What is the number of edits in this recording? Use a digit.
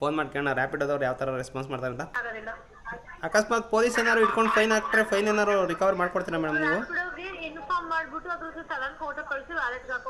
1